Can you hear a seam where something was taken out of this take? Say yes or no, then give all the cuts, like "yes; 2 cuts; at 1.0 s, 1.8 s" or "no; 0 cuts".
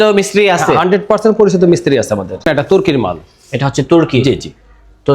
yes; 1 cut; at 2.3 s